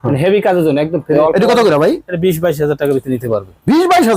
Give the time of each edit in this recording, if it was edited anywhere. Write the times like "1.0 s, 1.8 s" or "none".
1.1 s